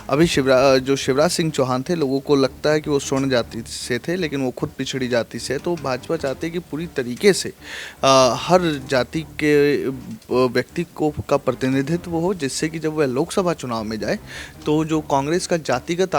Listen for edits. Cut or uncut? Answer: uncut